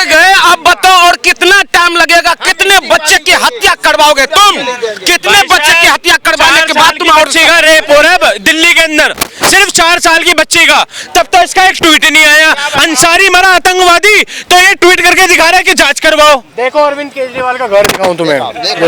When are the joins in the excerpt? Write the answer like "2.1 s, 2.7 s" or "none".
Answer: none